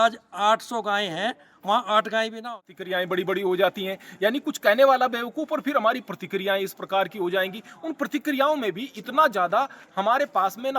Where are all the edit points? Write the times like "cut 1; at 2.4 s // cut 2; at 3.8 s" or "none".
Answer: cut 1; at 2.5 s